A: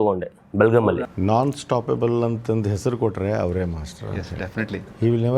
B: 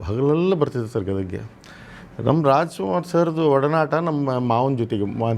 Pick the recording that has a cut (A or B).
A